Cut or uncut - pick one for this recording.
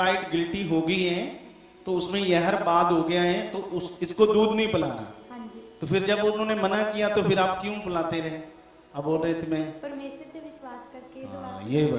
uncut